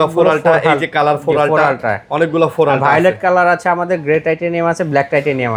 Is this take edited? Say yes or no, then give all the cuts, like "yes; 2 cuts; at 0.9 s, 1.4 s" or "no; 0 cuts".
no; 0 cuts